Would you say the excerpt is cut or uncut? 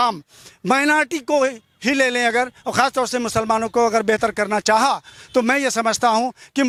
uncut